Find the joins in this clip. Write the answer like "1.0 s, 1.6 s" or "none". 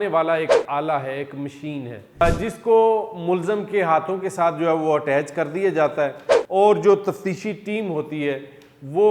2.2 s